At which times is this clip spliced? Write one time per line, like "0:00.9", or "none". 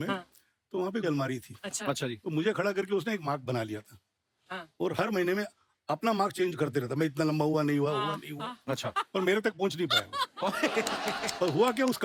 none